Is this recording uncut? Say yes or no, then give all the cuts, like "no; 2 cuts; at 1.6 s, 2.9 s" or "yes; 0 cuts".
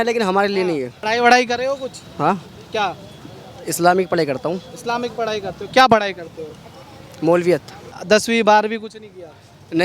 no; 2 cuts; at 0.9 s, 7.9 s